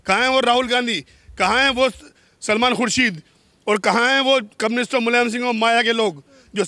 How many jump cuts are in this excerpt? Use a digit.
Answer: 0